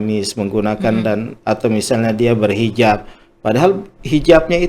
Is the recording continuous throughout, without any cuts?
yes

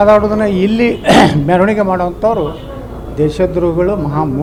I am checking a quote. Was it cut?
no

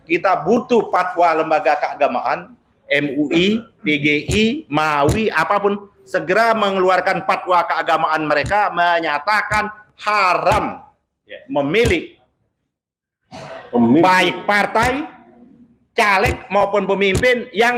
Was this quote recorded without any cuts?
yes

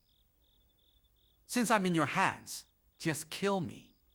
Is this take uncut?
yes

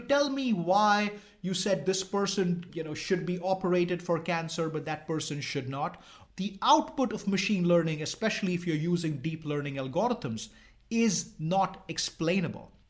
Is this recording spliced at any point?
yes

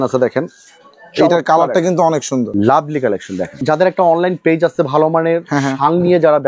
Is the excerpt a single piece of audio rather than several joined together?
no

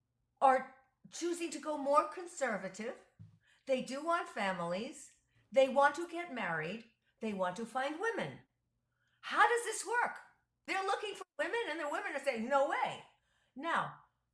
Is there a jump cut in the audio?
yes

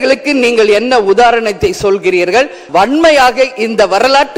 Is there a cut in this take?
yes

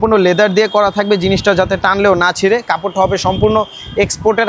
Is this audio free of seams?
yes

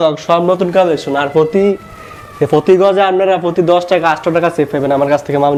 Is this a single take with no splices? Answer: yes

